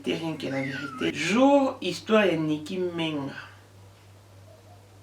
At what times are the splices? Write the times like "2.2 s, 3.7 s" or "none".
1.1 s

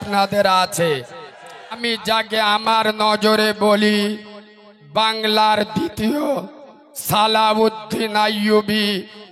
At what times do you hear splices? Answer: 1.8 s

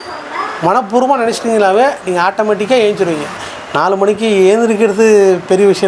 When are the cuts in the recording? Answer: 3.5 s

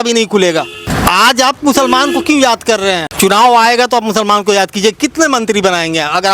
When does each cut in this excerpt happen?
0.9 s, 3.1 s

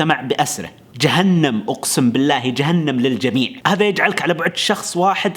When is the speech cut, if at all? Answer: 3.6 s

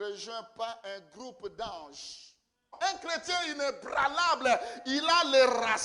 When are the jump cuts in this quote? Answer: 2.7 s

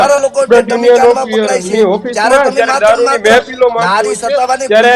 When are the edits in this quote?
none

